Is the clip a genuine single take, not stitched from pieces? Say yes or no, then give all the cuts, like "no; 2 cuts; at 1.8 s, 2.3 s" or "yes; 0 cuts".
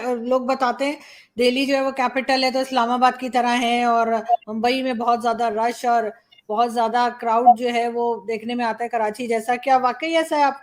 yes; 0 cuts